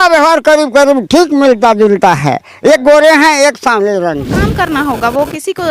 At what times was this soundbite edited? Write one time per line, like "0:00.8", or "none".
0:04.4